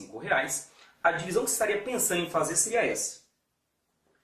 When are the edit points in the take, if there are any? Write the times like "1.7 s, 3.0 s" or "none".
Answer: 2.0 s